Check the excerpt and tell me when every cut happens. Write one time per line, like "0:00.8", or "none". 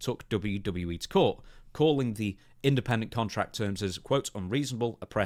none